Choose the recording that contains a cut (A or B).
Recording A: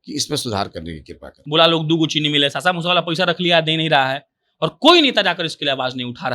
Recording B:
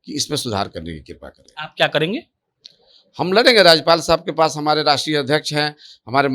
A